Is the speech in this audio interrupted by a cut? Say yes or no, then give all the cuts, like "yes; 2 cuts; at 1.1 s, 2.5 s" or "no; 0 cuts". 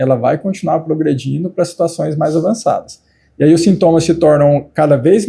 no; 0 cuts